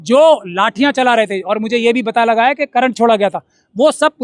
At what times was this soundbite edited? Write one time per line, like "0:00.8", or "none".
none